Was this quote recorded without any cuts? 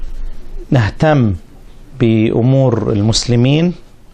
no; 1 cut; at 3.2 s

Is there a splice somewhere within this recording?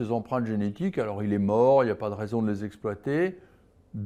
no; 0 cuts

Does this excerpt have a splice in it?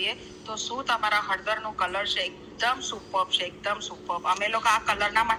no; 0 cuts

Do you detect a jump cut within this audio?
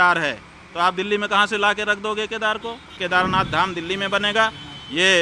yes; 1 cut; at 2.9 s

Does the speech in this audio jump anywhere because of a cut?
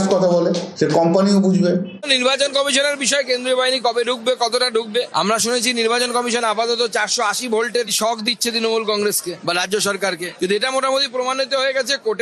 yes; 1 cut; at 2.0 s

